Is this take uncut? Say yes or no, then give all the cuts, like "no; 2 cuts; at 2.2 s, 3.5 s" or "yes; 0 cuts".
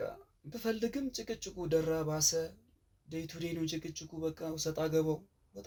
yes; 0 cuts